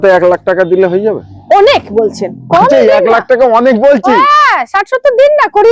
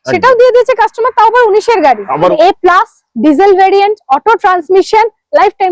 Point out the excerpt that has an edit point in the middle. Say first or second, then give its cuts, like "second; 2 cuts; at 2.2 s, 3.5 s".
second; 1 cut; at 2.3 s